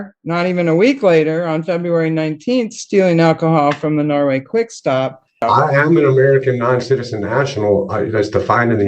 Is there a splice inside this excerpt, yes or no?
yes